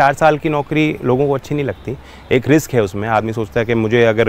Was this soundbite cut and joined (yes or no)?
no